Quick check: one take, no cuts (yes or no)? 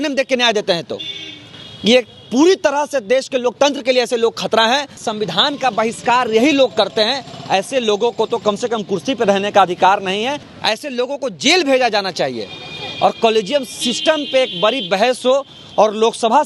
no